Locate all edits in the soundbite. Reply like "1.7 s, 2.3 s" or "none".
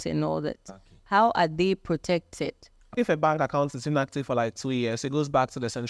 2.9 s